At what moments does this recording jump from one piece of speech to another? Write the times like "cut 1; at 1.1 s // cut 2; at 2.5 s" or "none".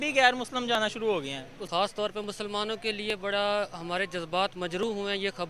cut 1; at 1.5 s